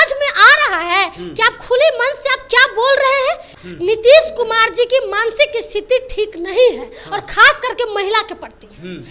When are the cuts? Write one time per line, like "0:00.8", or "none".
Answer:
0:03.5